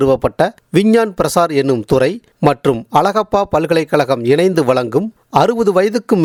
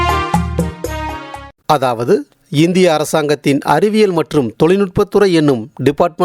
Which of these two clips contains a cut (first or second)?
second